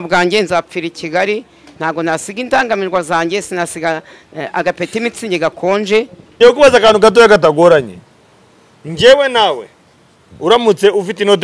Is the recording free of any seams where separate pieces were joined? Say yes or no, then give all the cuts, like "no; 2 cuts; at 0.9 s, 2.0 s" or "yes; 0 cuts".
no; 1 cut; at 6.2 s